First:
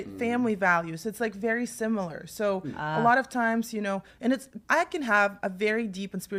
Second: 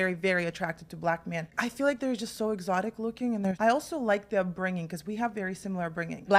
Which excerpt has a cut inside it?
second; 1 cut; at 3.6 s

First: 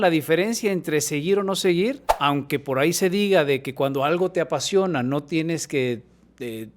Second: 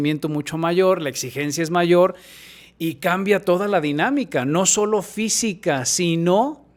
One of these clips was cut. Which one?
first; 1 cut; at 2.1 s

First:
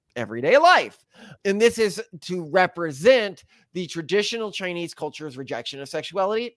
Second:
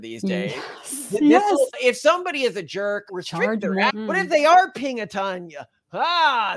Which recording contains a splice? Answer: second; 3 cuts; at 1.7 s, 3.1 s, 3.9 s

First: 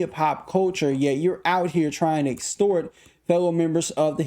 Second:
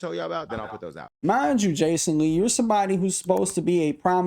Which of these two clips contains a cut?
second; 1 cut; at 1.2 s

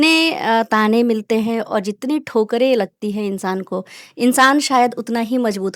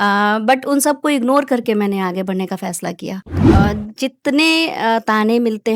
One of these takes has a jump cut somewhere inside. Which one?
second; 1 cut; at 3.4 s

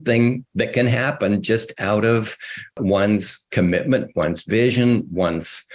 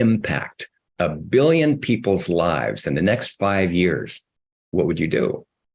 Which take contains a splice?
first; 1 cut; at 2.8 s

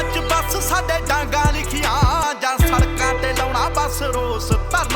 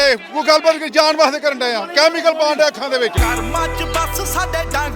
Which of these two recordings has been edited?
first; 1 cut; at 2.2 s

